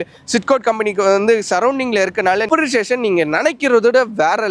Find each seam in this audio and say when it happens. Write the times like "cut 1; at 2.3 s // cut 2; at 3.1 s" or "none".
cut 1; at 2.5 s